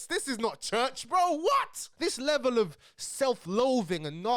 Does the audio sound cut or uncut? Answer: cut